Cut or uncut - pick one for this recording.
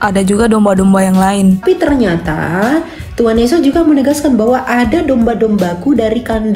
cut